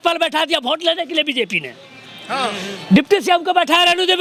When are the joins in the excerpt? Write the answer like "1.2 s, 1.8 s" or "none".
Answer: none